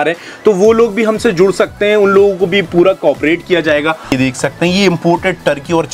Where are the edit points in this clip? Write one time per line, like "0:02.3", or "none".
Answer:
0:04.1